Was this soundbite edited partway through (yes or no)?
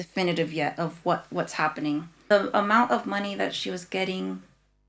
yes